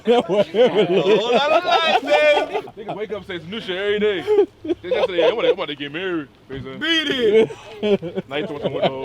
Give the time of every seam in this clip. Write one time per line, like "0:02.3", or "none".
0:02.6